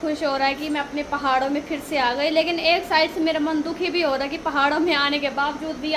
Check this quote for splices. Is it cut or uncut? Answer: uncut